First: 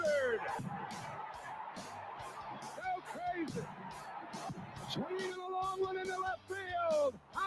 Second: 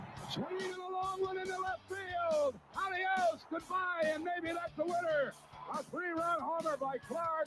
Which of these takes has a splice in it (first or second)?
second